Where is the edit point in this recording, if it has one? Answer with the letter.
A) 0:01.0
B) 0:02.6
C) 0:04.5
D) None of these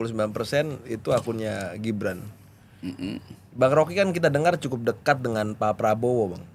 D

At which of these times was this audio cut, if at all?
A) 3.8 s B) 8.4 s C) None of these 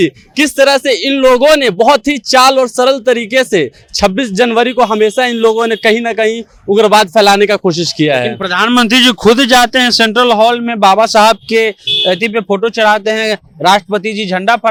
C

